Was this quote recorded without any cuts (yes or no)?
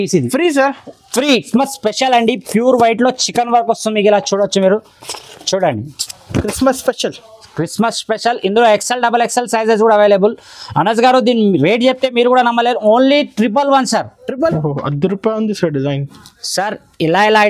no